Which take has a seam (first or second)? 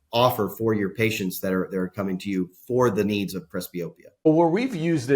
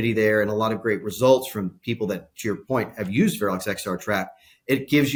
first